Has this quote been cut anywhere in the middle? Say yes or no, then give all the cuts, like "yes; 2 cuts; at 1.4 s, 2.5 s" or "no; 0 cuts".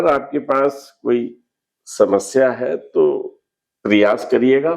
no; 0 cuts